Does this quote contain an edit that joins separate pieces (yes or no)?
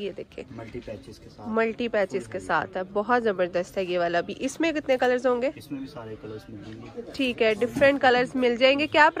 no